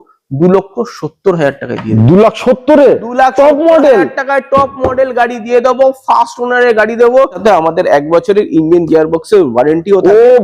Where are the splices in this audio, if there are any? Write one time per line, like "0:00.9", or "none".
0:07.4

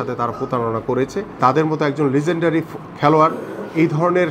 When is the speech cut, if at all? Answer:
0:01.3

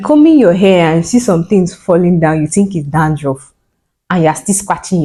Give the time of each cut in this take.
none

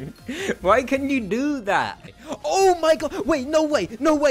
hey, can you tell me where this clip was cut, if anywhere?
0:02.0

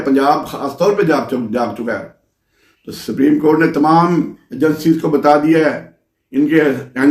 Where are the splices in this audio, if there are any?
none

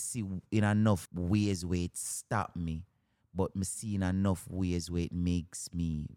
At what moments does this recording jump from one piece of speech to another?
0:01.1

